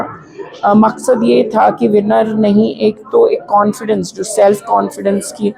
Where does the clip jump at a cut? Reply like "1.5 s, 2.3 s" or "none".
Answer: none

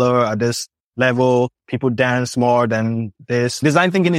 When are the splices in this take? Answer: 1.6 s, 3.1 s

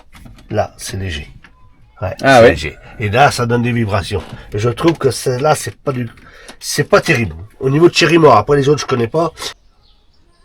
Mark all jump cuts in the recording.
9.5 s

